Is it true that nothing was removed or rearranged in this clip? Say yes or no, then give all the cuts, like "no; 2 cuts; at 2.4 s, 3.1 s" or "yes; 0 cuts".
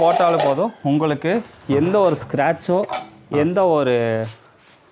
yes; 0 cuts